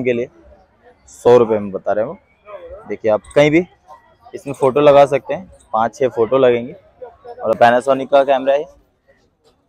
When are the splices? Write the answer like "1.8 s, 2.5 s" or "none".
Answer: 7.6 s

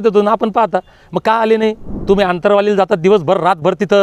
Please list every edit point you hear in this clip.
1.9 s

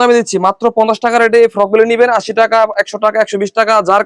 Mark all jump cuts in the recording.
none

